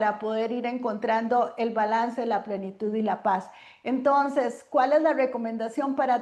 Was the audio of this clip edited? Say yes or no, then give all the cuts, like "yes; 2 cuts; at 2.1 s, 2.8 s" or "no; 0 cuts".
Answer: no; 0 cuts